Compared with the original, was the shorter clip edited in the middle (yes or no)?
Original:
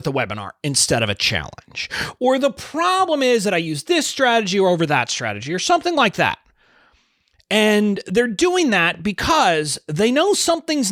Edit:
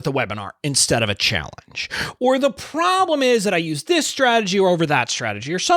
no